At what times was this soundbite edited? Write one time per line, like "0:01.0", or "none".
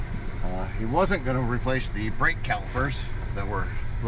none